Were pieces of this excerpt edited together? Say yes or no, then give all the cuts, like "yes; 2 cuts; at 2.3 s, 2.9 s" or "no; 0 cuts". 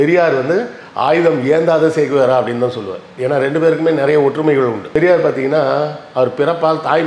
no; 0 cuts